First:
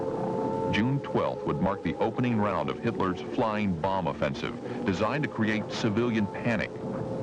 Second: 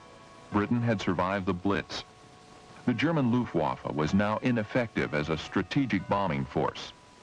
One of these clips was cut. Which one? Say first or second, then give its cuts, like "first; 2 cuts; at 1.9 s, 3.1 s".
first; 1 cut; at 5.7 s